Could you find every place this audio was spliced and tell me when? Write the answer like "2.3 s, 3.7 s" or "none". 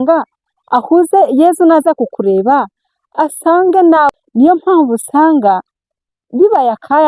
4.1 s